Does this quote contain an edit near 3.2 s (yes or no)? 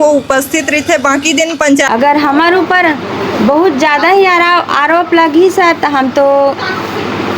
no